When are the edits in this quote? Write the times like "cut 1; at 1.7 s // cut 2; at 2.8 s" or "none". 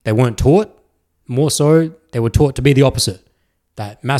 none